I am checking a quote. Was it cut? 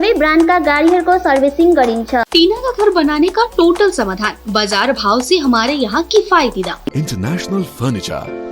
yes; 2 cuts; at 2.3 s, 6.9 s

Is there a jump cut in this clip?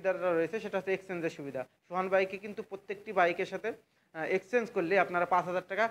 no; 0 cuts

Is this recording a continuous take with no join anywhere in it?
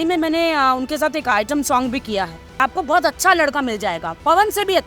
no; 1 cut; at 2.6 s

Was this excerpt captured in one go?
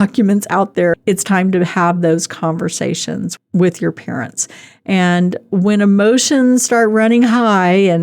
no; 2 cuts; at 1.0 s, 3.3 s

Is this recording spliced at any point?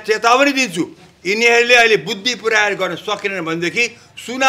no; 0 cuts

